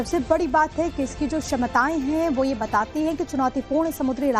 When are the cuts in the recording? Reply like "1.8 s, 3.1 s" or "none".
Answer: none